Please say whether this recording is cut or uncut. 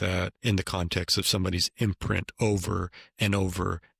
uncut